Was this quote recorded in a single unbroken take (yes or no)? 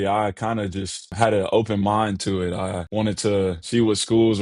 no